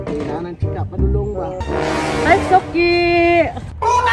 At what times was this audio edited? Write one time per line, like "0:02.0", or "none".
0:01.6